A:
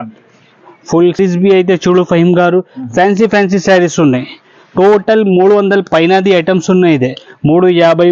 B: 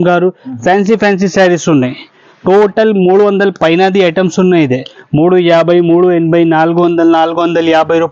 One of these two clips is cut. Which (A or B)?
A